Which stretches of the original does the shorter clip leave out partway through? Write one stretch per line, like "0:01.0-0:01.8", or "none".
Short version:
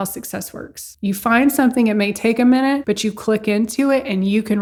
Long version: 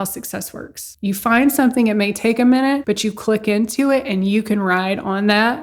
none